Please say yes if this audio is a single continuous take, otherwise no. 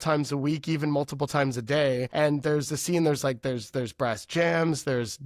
no